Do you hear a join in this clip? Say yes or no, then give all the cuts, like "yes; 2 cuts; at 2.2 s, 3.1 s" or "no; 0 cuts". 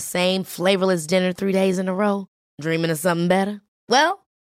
no; 0 cuts